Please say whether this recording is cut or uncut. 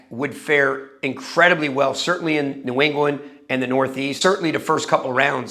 cut